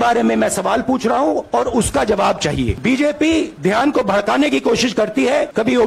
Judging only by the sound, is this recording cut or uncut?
uncut